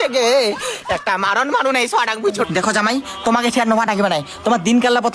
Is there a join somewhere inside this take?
yes; 1 cut; at 2.4 s

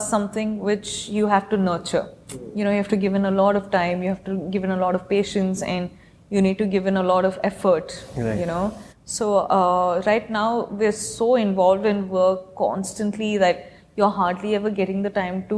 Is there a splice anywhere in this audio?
no; 0 cuts

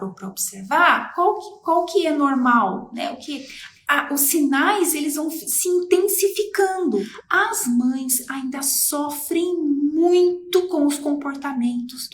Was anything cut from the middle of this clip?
yes; 1 cut; at 7.1 s

